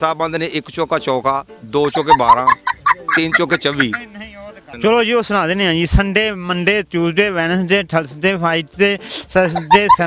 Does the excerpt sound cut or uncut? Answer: cut